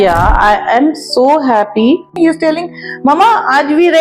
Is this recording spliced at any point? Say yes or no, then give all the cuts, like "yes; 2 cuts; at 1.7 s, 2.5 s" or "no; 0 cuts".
yes; 1 cut; at 2.1 s